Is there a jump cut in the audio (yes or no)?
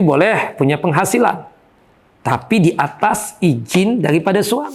no